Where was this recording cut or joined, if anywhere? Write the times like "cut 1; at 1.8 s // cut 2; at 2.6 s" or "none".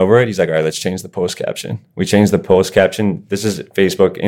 none